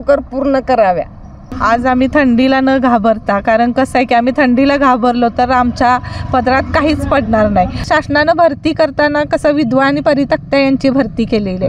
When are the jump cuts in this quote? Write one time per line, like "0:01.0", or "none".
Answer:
0:01.5
0:07.9